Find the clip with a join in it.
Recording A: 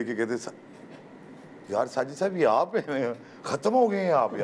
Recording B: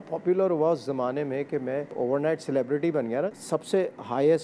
B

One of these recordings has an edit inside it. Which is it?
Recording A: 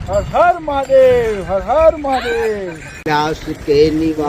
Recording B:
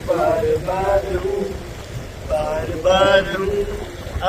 A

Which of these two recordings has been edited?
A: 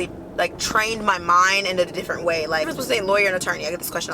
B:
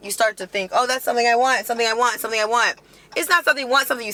A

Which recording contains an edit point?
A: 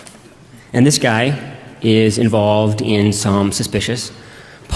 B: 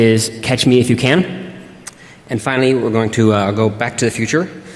A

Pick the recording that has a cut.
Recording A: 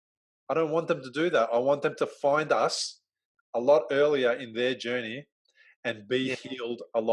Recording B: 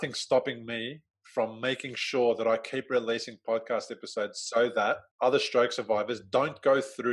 B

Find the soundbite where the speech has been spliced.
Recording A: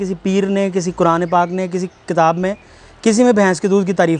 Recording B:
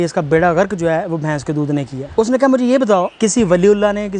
B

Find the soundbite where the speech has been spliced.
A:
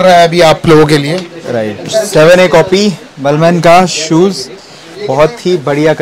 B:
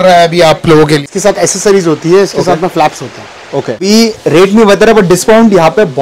B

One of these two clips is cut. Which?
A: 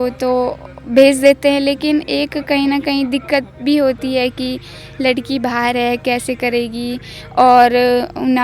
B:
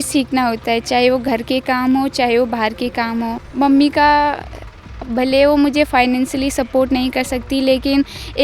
B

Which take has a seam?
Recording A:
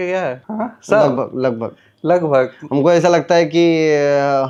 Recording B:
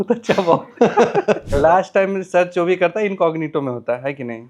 B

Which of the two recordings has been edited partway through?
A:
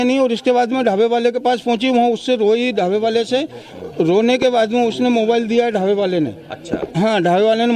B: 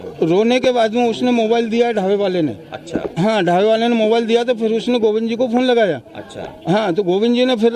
A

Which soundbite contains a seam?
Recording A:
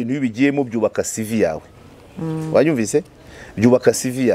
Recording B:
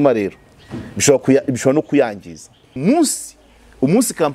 B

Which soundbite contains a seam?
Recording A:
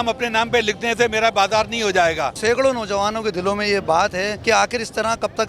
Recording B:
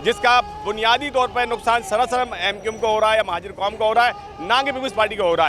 A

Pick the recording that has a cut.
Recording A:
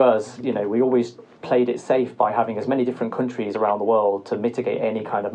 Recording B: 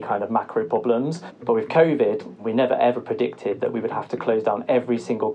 B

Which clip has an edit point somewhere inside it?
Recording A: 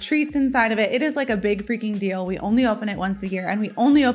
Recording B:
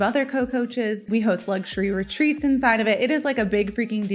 B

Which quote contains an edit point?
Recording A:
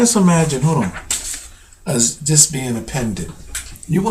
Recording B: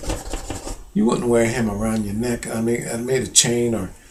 A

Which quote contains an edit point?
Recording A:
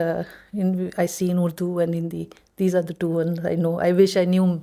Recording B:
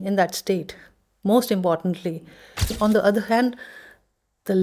B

